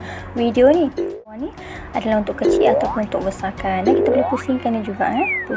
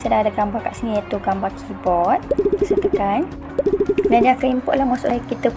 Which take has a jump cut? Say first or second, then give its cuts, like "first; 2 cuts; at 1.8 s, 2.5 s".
first; 1 cut; at 1.3 s